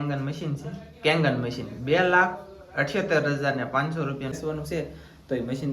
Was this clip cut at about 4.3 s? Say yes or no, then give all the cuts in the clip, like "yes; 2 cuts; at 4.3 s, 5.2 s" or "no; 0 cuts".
yes; 1 cut; at 4.3 s